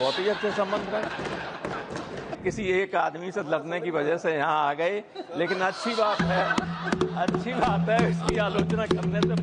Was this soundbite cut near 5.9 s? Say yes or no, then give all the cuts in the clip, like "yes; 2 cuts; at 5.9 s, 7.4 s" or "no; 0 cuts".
no; 1 cut; at 2.4 s